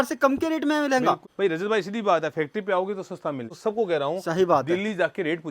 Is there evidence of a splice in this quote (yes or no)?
yes